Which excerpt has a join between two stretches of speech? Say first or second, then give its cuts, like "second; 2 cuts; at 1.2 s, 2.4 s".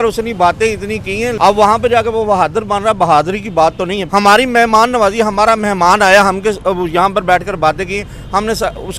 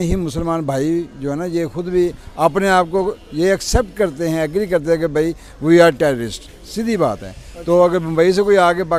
first; 2 cuts; at 1.3 s, 4.0 s